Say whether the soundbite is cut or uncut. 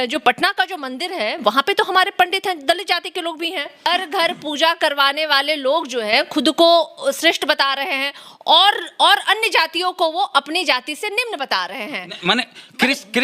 cut